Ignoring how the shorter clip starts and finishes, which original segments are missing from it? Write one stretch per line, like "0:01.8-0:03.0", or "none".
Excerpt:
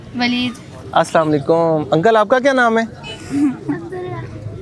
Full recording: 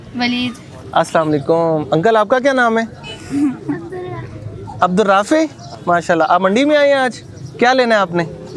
none